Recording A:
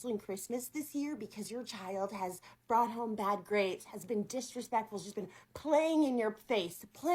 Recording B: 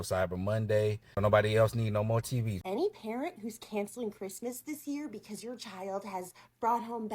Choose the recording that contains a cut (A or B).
B